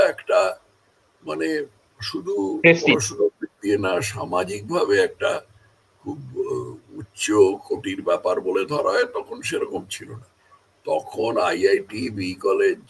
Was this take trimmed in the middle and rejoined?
no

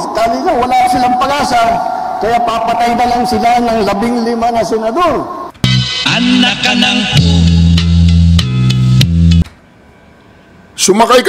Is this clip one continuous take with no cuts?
no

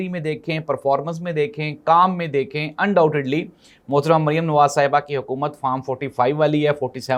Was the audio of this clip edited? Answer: no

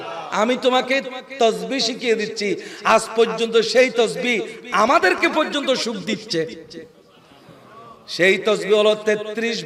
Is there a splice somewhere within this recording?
no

